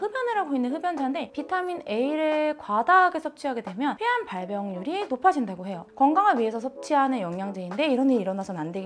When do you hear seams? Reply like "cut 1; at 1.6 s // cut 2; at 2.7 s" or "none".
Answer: none